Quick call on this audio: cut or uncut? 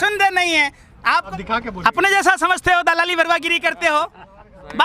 cut